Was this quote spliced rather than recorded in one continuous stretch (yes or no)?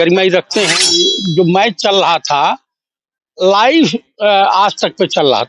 yes